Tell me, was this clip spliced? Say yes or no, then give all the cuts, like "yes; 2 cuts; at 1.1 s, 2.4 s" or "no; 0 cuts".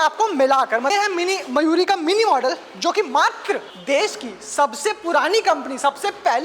yes; 2 cuts; at 0.9 s, 3.7 s